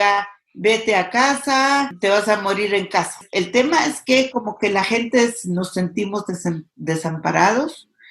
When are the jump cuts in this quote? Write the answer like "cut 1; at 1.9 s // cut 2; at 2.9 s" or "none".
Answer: cut 1; at 1.9 s // cut 2; at 3.2 s